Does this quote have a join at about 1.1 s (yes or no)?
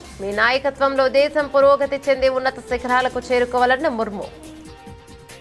no